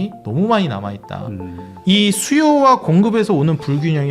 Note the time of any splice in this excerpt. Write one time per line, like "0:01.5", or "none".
0:01.7